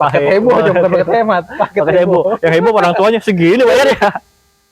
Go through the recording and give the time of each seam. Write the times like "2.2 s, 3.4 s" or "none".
none